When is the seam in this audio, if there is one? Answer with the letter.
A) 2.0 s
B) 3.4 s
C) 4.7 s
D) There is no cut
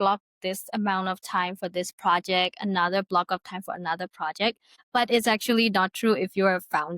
C